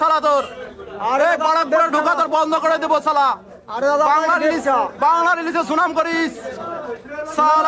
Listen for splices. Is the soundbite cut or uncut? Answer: uncut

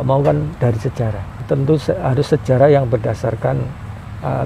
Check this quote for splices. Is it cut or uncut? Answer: cut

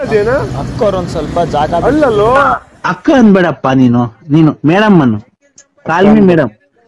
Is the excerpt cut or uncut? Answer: uncut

